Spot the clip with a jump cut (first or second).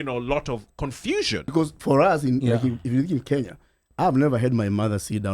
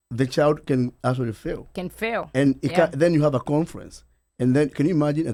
first